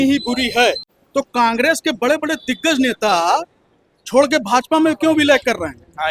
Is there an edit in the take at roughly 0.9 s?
yes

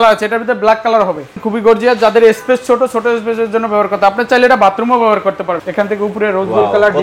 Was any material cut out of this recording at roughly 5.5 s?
yes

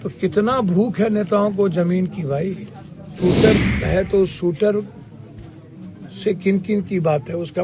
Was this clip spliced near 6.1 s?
no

